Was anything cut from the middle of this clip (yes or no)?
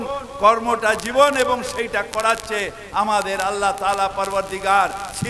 no